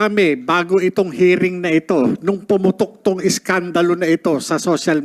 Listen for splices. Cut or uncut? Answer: uncut